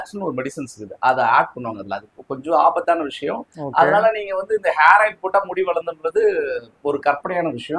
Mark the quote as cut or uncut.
uncut